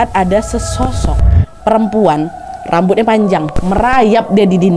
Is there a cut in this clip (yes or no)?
yes